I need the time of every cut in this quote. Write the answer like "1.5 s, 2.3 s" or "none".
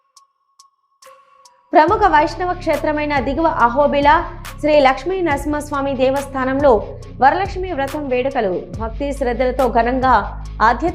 1.4 s